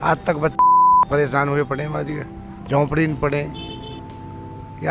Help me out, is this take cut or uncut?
uncut